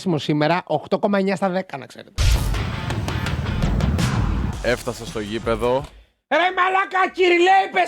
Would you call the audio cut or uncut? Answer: cut